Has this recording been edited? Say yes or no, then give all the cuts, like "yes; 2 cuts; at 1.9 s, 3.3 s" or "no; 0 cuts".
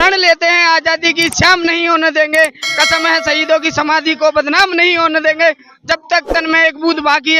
no; 0 cuts